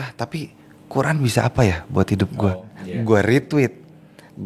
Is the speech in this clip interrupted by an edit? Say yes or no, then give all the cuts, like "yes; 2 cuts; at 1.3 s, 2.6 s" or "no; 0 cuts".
yes; 1 cut; at 2.5 s